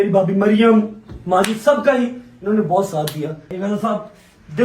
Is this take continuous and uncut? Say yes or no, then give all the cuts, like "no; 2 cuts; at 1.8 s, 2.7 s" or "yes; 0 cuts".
no; 1 cut; at 3.5 s